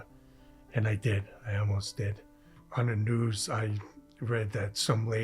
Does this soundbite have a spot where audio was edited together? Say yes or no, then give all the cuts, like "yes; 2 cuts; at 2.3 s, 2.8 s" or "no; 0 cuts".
yes; 1 cut; at 2.6 s